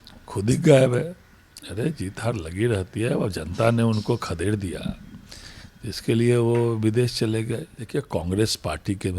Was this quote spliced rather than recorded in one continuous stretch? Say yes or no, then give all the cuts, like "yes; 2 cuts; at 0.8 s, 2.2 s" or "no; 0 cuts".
yes; 1 cut; at 7.8 s